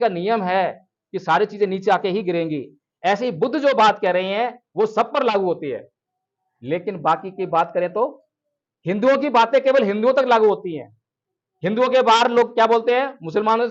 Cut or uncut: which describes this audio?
uncut